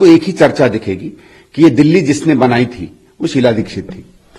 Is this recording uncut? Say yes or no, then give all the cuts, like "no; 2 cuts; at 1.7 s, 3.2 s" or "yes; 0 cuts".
yes; 0 cuts